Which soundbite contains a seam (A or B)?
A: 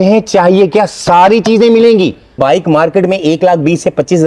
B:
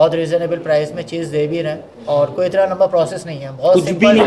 A